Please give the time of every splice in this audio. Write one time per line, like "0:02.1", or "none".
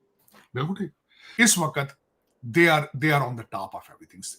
0:01.2